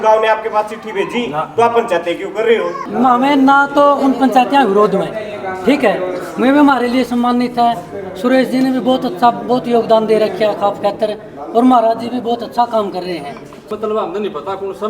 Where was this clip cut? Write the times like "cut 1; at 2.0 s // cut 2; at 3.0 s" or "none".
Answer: cut 1; at 2.8 s // cut 2; at 13.6 s